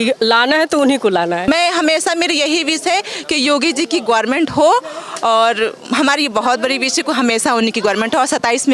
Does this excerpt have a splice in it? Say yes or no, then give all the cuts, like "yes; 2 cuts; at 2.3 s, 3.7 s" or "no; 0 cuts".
yes; 1 cut; at 1.5 s